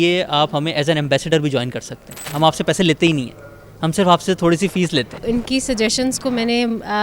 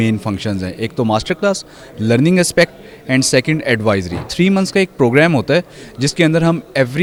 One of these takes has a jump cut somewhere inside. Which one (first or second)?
first